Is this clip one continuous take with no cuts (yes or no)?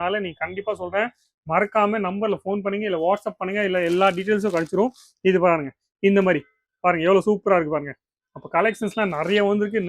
yes